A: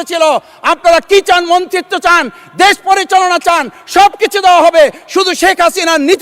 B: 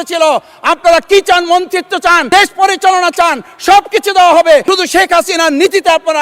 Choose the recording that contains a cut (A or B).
B